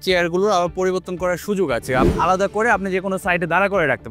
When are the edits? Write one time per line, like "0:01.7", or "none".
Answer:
0:02.1

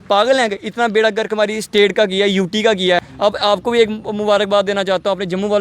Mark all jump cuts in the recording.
0:03.0

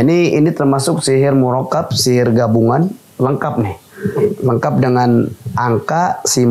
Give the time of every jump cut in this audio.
none

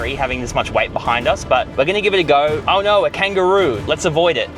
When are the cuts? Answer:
0:01.7
0:02.6

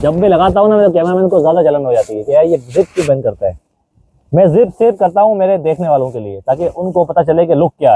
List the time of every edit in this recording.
none

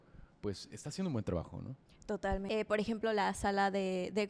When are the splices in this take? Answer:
0:02.4

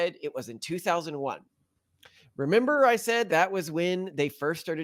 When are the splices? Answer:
none

